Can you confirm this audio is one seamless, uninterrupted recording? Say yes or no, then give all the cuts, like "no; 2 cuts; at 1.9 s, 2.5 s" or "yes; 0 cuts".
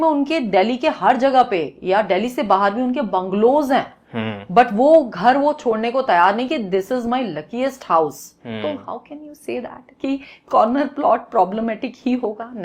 yes; 0 cuts